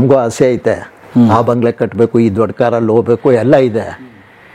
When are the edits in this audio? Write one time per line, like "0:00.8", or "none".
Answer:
none